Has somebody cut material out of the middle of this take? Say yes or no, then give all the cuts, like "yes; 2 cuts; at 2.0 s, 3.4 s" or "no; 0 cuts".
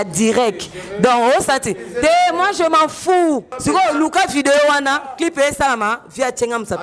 yes; 1 cut; at 3.5 s